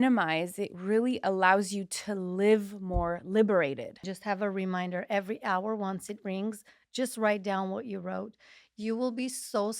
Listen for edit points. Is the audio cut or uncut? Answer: cut